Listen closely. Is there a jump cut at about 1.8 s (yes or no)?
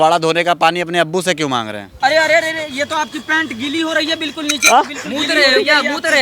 yes